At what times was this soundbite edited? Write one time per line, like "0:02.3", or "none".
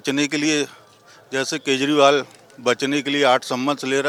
none

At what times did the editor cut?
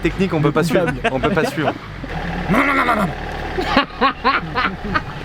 0:02.1

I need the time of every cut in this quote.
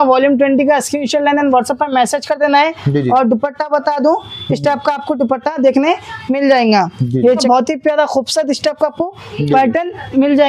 0:07.4

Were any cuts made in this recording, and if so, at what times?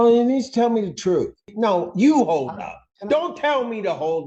0:01.5

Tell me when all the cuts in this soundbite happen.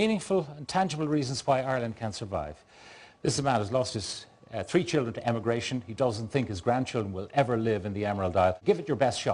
none

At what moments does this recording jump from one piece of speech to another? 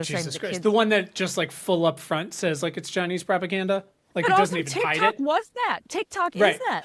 none

